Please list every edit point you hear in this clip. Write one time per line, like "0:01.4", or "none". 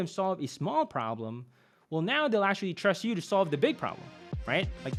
none